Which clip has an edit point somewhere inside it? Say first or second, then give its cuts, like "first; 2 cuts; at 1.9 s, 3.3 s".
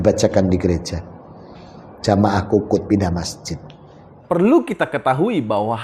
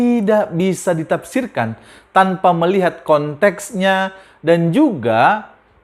first; 1 cut; at 4.2 s